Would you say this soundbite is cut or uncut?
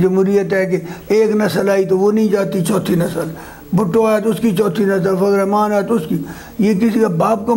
uncut